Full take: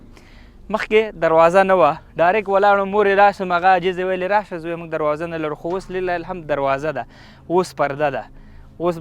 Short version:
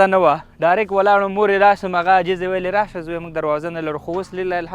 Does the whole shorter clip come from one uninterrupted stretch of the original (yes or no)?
yes